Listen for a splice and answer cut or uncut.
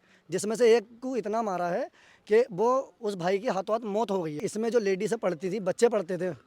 cut